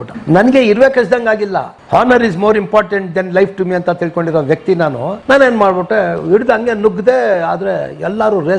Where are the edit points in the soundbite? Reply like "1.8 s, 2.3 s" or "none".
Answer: 1.8 s